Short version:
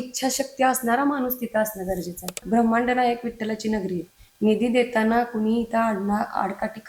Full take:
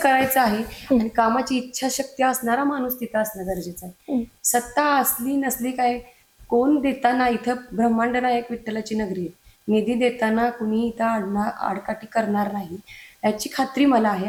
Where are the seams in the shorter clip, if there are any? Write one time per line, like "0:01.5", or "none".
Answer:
0:02.4